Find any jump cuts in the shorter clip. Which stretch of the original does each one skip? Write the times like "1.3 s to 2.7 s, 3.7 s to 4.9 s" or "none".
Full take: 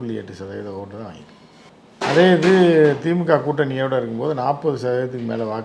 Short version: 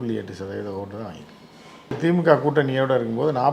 2.0 s to 3.0 s

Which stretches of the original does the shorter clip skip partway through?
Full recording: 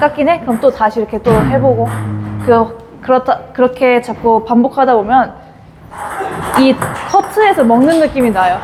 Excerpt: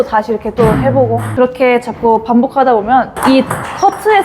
1.9 s to 3.5 s, 5.3 s to 6.4 s

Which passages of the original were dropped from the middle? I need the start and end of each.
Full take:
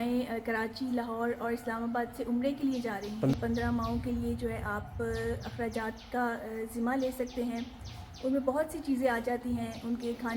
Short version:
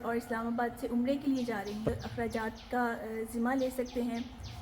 3.3 s to 5.3 s

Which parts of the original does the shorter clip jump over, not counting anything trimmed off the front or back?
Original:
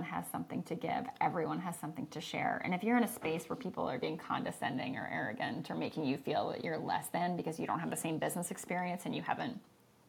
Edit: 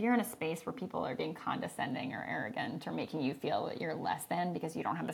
none

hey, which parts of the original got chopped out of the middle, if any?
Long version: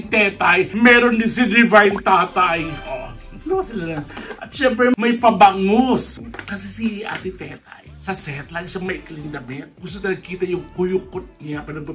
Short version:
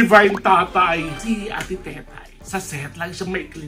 2.8 s to 6.7 s

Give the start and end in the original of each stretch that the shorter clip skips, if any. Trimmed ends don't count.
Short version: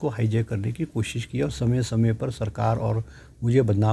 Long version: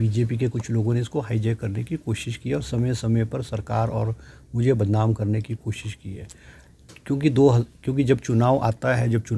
none

